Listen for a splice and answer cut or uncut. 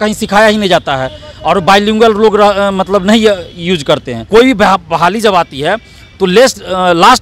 cut